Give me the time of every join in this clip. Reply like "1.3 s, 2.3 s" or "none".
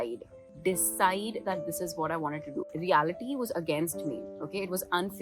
2.7 s